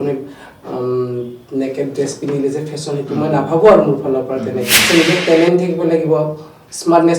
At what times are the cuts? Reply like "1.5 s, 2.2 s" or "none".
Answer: 4.8 s